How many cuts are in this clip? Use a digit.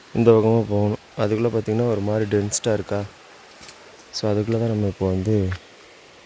0